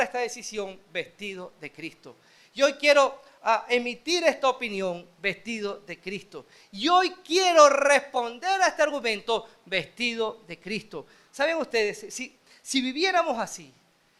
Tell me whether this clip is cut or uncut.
uncut